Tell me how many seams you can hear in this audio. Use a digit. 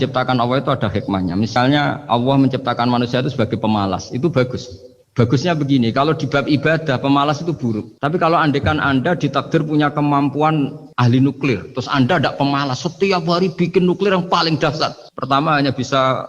2